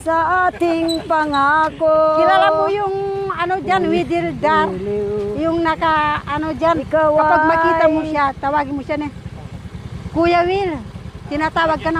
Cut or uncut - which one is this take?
uncut